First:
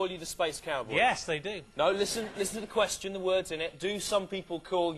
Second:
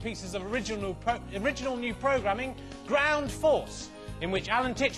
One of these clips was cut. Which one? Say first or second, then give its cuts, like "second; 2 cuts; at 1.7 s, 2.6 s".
first; 1 cut; at 3.8 s